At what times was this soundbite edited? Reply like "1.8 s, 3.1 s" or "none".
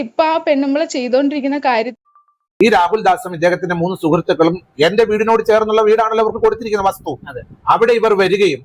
2.0 s

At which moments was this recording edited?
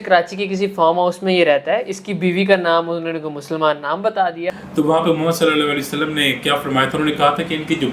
4.5 s

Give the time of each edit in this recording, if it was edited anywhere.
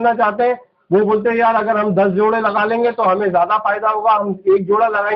none

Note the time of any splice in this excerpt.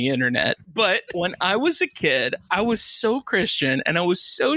1.1 s, 2.4 s

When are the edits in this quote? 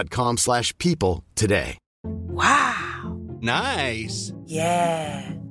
none

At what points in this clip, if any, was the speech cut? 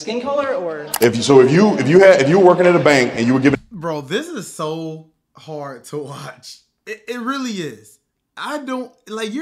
none

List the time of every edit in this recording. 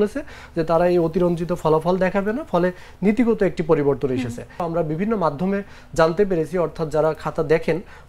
4.6 s

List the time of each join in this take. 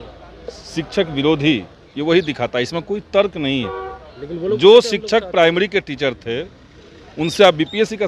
none

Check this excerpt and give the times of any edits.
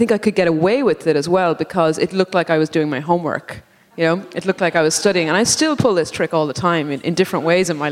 none

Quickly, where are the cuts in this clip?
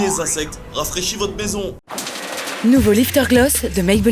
1.9 s

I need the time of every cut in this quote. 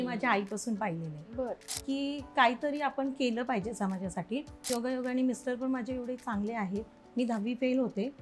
1.7 s, 4.7 s

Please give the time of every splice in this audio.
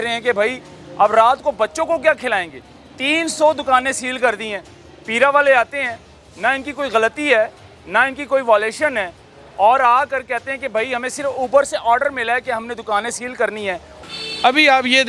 13.9 s

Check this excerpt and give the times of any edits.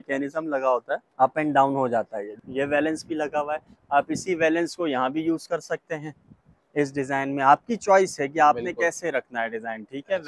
1.1 s, 2.3 s

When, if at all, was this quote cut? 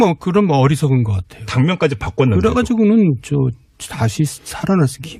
none

